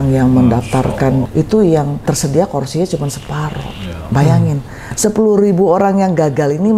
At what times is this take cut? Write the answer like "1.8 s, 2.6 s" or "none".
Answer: 1.2 s, 2.0 s